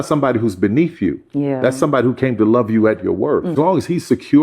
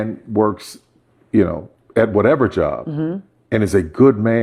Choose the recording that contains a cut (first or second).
first